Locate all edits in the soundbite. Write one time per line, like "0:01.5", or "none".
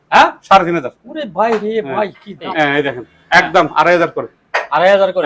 0:02.5